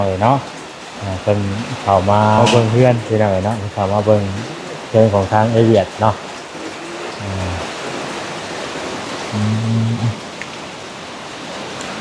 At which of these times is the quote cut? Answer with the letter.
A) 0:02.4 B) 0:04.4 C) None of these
A